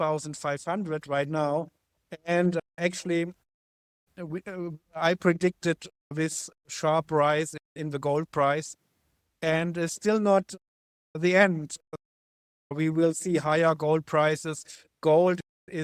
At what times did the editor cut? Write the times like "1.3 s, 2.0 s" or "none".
none